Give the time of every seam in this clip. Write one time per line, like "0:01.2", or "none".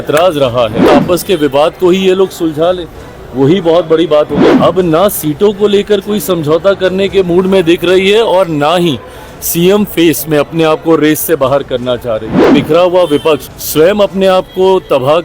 0:00.9
0:04.5
0:12.5
0:13.6

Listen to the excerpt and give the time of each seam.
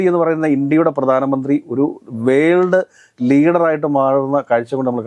none

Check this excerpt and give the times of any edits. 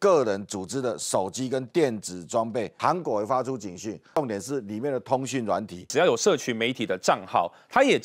0:02.7
0:04.2
0:05.9

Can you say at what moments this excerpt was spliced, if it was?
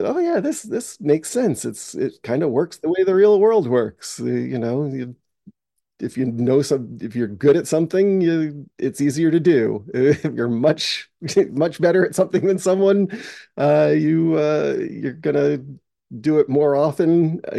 none

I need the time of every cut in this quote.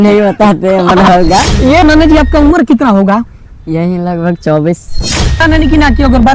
0:01.8
0:05.4

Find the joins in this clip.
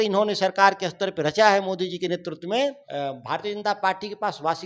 0:02.8

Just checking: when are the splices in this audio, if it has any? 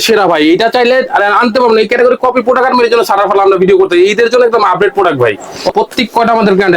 0:05.7

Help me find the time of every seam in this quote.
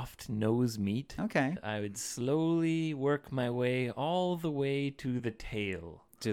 0:01.6

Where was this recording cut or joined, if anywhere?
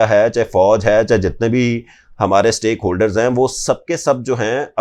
none

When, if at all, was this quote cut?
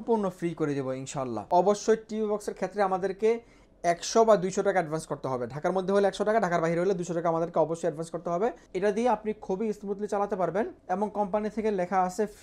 0:01.4
0:08.7
0:10.8

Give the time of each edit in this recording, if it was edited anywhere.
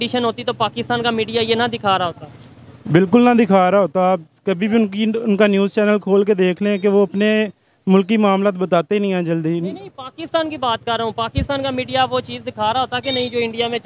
none

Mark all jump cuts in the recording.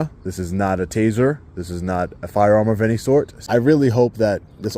0:03.4

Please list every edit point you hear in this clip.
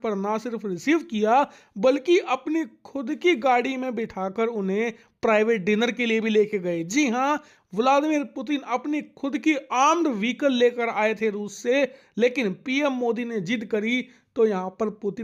none

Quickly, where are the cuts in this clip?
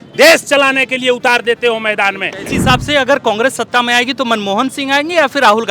0:02.5

